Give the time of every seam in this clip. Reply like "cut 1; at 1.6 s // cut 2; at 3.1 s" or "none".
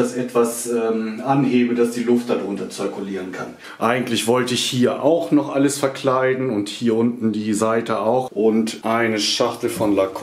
cut 1; at 3.6 s // cut 2; at 8.5 s